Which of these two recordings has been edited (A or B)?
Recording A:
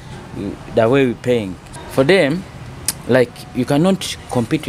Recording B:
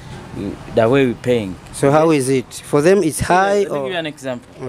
A